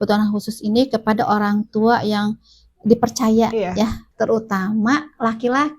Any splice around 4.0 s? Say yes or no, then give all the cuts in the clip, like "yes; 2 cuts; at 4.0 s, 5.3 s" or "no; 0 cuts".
yes; 1 cut; at 4.0 s